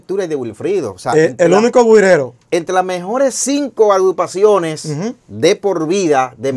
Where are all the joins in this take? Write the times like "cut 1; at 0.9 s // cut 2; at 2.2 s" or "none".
none